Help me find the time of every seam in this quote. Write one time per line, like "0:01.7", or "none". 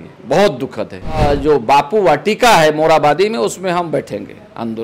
0:01.2